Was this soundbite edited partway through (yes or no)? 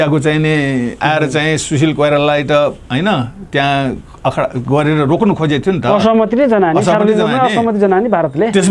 no